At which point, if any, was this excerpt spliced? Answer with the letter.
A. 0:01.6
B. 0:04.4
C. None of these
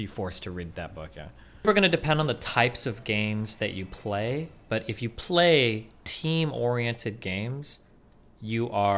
A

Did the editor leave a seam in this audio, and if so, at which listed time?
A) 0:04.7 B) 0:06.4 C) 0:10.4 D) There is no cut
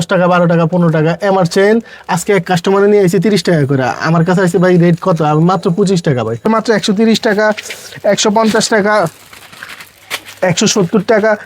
B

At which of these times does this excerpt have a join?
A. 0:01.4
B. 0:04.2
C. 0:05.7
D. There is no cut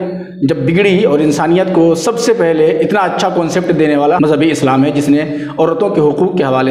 B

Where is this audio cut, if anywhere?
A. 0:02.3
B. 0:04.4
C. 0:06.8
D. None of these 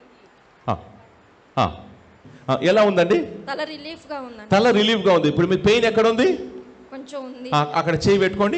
A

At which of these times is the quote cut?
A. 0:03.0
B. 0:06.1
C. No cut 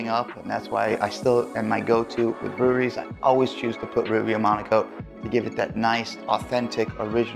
B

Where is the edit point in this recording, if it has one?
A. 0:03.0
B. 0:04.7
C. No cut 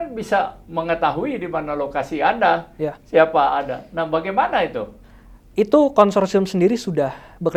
C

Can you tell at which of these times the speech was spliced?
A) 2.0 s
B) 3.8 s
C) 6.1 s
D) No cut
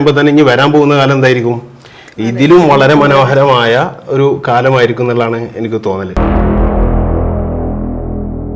C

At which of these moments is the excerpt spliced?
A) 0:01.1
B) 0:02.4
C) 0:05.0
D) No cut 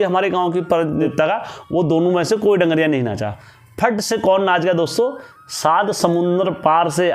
A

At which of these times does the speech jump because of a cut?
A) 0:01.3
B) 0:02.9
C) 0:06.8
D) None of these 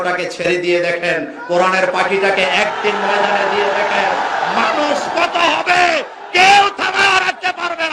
D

